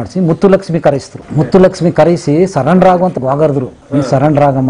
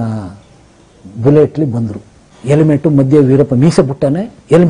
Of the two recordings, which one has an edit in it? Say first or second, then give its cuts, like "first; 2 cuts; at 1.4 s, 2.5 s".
first; 2 cuts; at 1.2 s, 3.1 s